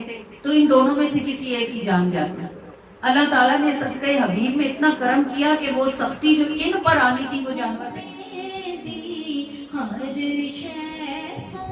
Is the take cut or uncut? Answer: cut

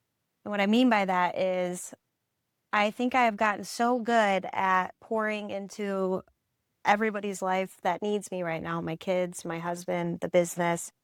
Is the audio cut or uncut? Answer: uncut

